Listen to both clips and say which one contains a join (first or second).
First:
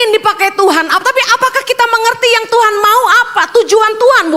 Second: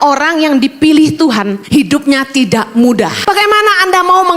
second